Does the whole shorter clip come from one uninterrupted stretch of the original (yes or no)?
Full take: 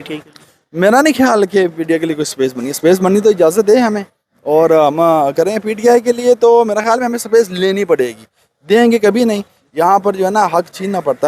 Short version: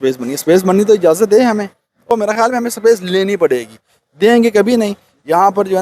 no